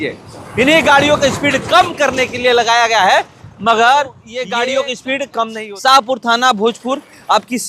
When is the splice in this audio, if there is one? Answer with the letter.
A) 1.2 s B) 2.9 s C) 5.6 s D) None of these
C